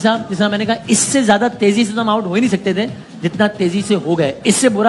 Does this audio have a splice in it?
no; 0 cuts

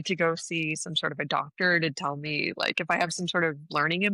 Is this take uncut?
yes; 0 cuts

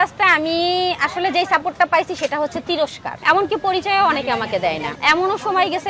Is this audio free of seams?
no; 2 cuts; at 3.2 s, 4.9 s

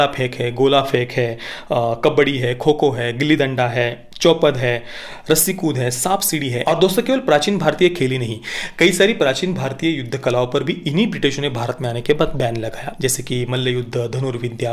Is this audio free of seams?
no; 2 cuts; at 6.5 s, 12.8 s

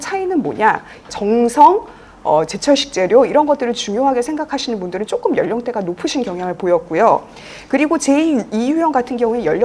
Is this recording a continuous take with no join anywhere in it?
no; 1 cut; at 1.0 s

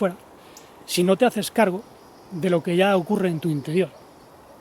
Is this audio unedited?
yes; 0 cuts

